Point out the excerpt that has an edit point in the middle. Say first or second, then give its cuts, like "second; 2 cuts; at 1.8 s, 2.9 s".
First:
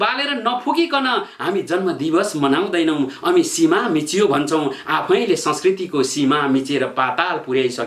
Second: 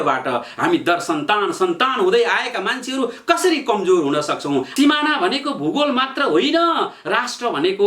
second; 1 cut; at 4.7 s